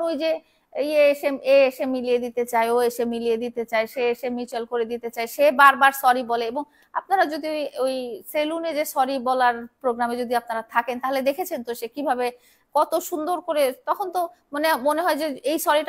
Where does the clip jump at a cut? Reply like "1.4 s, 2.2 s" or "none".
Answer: none